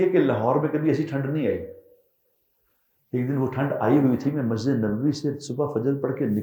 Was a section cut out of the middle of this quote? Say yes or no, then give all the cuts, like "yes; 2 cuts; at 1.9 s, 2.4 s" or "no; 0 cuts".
no; 0 cuts